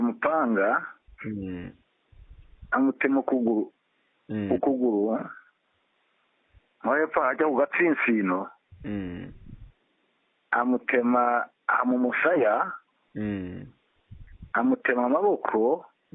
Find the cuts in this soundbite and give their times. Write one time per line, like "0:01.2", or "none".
none